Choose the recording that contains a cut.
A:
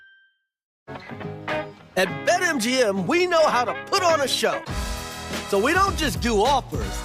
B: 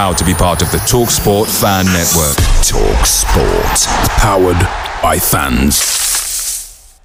A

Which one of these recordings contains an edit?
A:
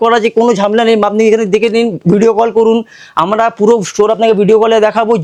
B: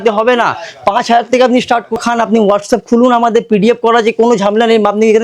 B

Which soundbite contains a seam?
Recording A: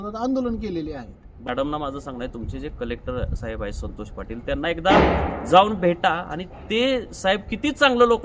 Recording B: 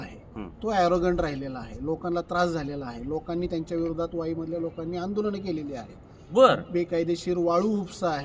A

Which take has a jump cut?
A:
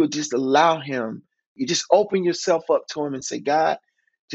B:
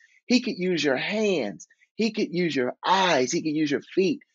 A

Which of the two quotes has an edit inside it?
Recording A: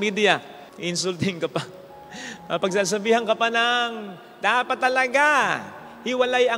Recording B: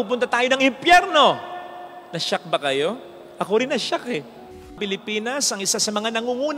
B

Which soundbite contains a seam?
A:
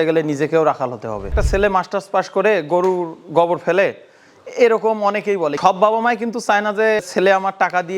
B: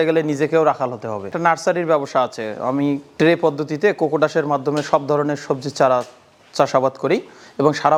A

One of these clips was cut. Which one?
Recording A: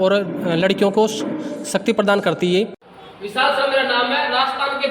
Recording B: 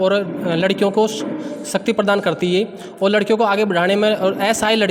A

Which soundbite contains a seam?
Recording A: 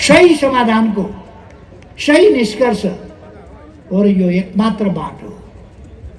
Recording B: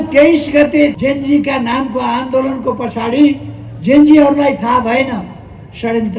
B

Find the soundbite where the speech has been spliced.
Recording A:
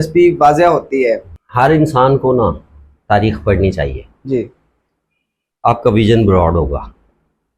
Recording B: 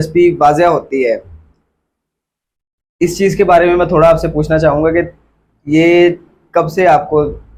A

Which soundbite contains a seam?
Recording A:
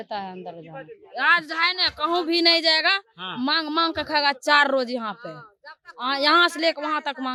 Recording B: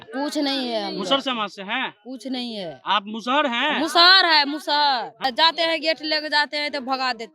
B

